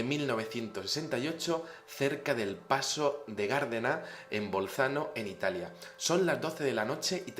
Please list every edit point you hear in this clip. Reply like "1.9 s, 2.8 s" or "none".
6.5 s